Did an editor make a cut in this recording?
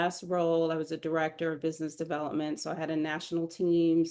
no; 0 cuts

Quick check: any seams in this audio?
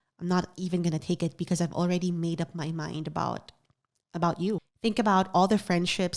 yes; 1 cut; at 4.6 s

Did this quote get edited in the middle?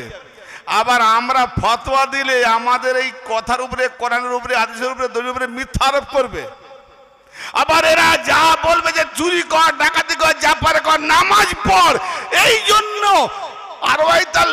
no; 0 cuts

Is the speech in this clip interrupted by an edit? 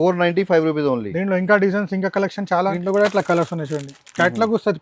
yes; 1 cut; at 2.8 s

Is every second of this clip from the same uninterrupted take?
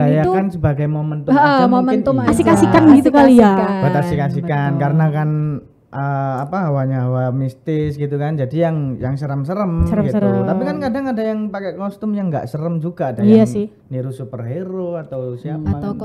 yes; 0 cuts

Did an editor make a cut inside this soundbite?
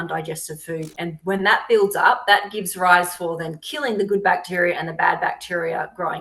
no; 0 cuts

